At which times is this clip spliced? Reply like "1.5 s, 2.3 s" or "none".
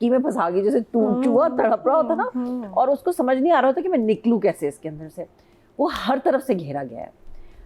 none